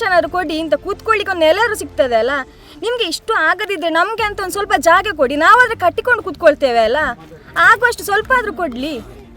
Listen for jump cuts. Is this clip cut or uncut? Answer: uncut